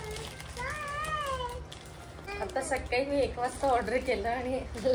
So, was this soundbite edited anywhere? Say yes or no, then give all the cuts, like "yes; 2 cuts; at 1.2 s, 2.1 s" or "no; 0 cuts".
yes; 1 cut; at 2.2 s